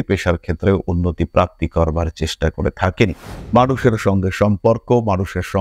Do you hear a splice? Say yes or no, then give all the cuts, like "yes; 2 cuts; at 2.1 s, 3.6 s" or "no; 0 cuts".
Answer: yes; 1 cut; at 3.3 s